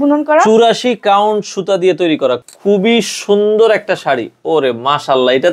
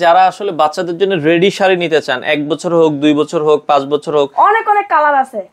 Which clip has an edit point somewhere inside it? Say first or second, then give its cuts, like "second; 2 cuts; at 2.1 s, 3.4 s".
first; 1 cut; at 2.4 s